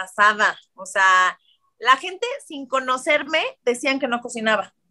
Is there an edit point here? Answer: no; 0 cuts

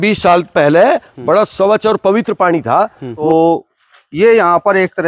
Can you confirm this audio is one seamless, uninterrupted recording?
no; 1 cut; at 3.1 s

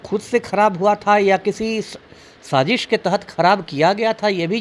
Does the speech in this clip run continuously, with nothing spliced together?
yes; 0 cuts

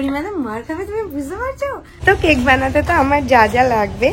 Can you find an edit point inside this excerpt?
yes; 1 cut; at 1.9 s

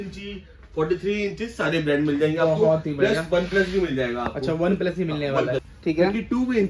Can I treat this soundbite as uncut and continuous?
no; 1 cut; at 5.7 s

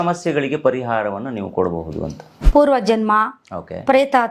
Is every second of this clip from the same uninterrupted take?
no; 1 cut; at 2.3 s

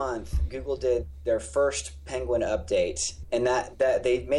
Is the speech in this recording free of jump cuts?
no; 1 cut; at 3.1 s

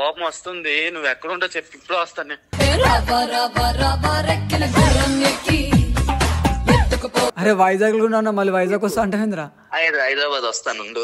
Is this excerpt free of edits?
no; 1 cut; at 7.4 s

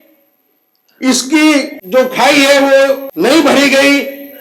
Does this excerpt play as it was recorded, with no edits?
no; 2 cuts; at 1.8 s, 3.1 s

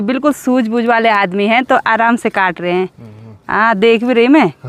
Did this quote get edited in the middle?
no; 0 cuts

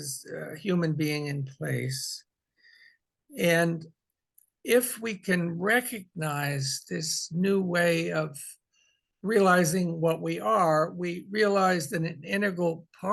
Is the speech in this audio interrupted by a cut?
no; 0 cuts

